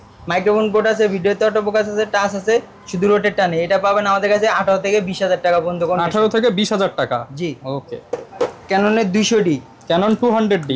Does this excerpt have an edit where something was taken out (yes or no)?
no